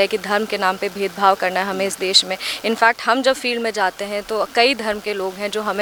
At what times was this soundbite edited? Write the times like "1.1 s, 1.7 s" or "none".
none